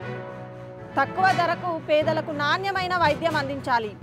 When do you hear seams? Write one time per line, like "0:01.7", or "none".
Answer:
none